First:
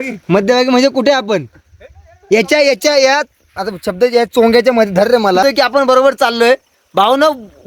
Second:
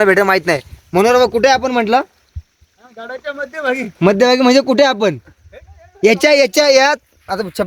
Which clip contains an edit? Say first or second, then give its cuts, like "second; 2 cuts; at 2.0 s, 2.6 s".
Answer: first; 1 cut; at 5.4 s